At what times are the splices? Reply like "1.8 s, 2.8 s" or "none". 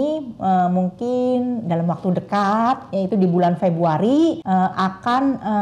4.4 s